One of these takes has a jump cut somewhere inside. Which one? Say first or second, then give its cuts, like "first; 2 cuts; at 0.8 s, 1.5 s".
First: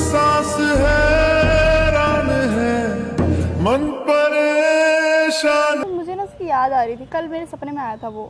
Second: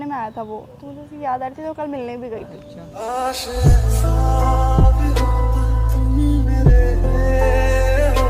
first; 1 cut; at 5.9 s